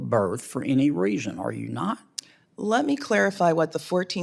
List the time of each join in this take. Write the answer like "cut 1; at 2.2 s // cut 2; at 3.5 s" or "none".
none

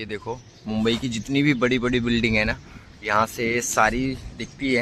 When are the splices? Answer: none

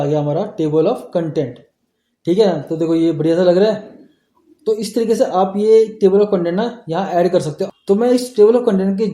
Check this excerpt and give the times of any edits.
none

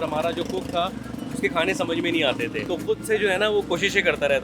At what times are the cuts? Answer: cut 1; at 2.6 s

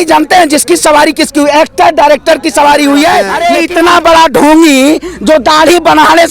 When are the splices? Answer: cut 1; at 3.3 s

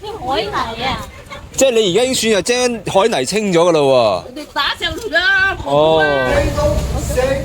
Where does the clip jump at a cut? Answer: cut 1; at 6.3 s

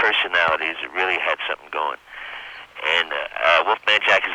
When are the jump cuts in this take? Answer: none

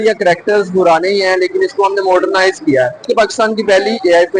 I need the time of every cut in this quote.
cut 1; at 3.1 s

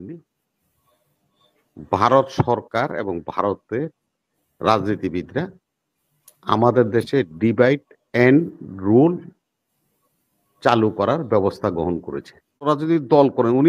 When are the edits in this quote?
cut 1; at 12.7 s

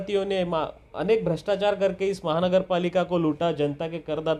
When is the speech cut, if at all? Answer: none

